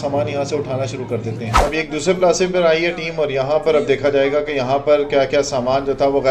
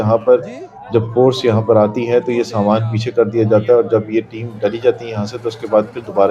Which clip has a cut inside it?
first; 1 cut; at 1.6 s

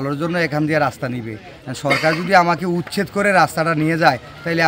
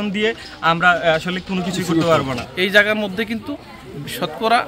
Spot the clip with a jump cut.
second; 1 cut; at 2.5 s

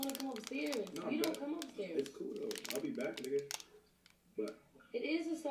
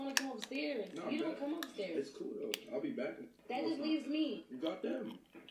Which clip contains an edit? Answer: second; 2 cuts; at 3.2 s, 4.5 s

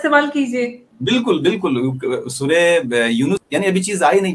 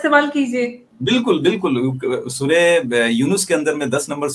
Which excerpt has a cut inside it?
first; 1 cut; at 3.4 s

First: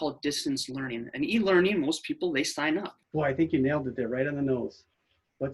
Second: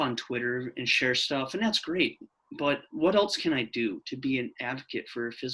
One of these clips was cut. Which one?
first; 1 cut; at 3.0 s

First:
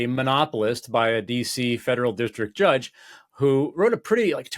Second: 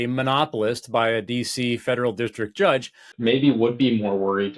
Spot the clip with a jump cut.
second; 1 cut; at 3.1 s

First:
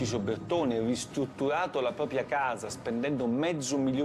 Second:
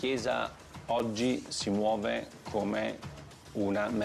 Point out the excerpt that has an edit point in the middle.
second; 1 cut; at 1.0 s

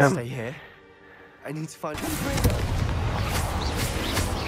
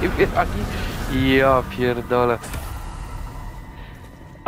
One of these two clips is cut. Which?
first; 1 cut; at 2.0 s

